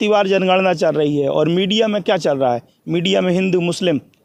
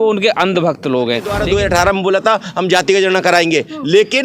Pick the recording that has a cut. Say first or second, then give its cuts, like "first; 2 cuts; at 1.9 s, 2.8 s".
second; 1 cut; at 1.4 s